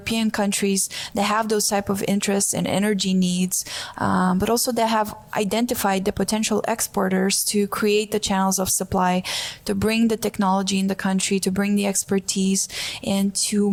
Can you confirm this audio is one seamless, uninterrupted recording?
yes; 0 cuts

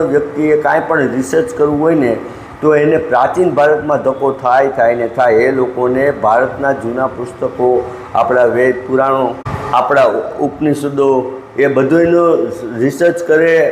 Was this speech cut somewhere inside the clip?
no; 0 cuts

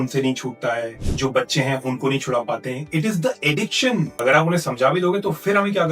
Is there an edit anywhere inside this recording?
yes; 2 cuts; at 1.0 s, 4.1 s

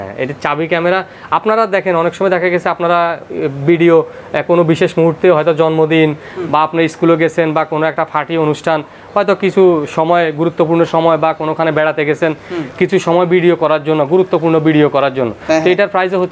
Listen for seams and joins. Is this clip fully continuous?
yes; 0 cuts

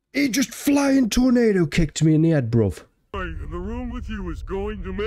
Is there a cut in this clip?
yes; 1 cut; at 3.2 s

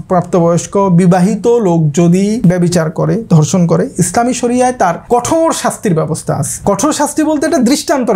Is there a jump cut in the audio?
yes; 3 cuts; at 2.4 s, 5.0 s, 6.5 s

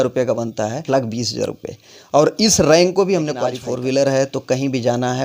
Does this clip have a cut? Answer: yes; 2 cuts; at 0.8 s, 3.6 s

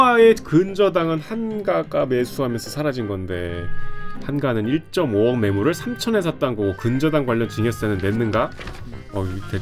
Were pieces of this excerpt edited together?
no; 0 cuts

